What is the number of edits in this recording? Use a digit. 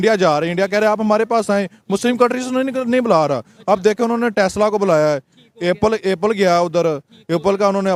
0